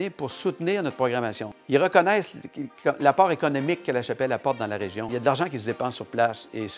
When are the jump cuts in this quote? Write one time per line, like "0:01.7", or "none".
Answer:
0:01.5
0:05.1

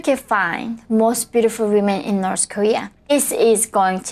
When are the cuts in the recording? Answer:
0:03.0

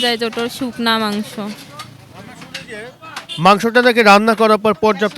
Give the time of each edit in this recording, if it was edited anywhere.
none

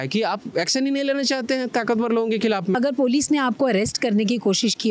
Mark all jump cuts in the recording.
0:02.8

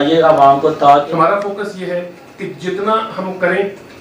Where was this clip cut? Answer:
0:01.1

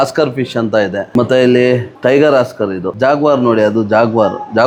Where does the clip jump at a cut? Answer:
none

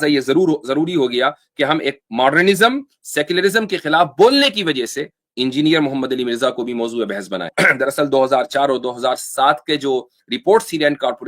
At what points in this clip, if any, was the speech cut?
0:07.5

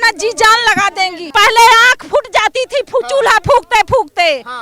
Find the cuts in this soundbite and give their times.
0:01.2

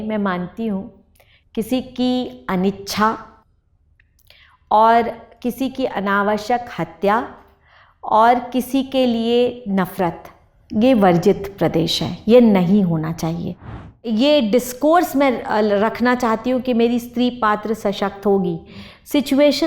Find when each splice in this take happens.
0:14.0

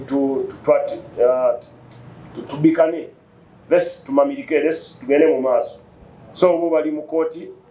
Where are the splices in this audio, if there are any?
none

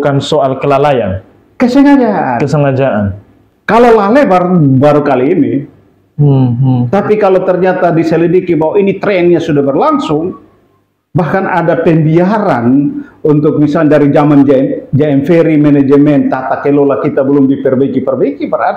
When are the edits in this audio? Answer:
none

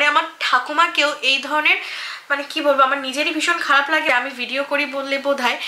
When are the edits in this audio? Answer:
0:04.1

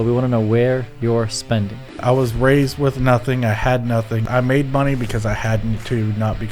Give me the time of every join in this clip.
0:01.9
0:04.2

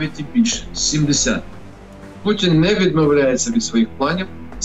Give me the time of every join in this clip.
0:02.1

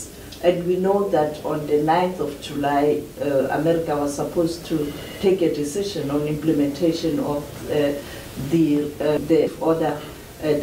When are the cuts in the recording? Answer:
0:09.5

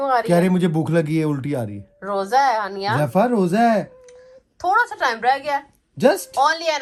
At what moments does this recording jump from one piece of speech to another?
none

